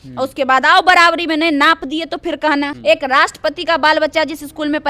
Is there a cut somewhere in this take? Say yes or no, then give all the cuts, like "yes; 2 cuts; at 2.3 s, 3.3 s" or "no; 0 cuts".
yes; 1 cut; at 2.7 s